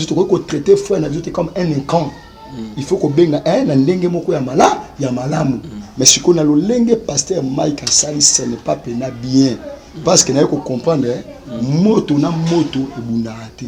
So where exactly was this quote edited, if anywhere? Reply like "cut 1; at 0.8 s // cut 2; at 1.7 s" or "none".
none